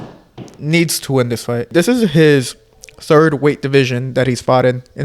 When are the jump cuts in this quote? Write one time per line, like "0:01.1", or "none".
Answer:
0:01.6